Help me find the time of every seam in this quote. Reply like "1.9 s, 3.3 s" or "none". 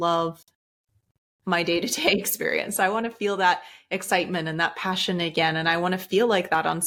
none